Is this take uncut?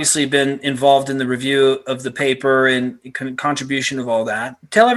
yes; 0 cuts

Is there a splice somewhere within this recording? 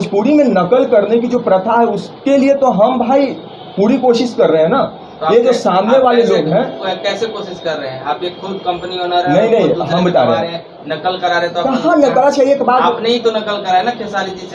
no; 0 cuts

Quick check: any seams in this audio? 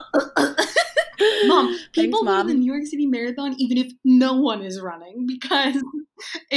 yes; 1 cut; at 1.5 s

